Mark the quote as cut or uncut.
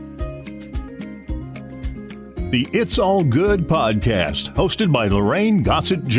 cut